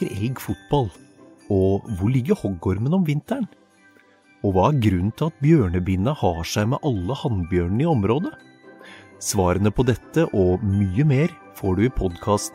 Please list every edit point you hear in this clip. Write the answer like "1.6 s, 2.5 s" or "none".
none